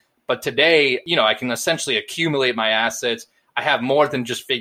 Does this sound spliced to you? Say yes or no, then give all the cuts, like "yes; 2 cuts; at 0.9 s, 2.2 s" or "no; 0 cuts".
no; 0 cuts